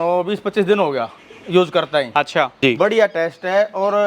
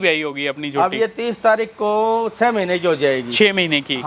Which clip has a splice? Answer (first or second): first